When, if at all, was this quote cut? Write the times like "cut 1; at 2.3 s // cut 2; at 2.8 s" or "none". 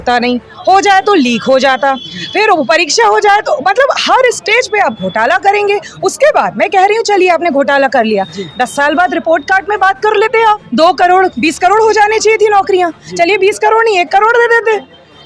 cut 1; at 10.6 s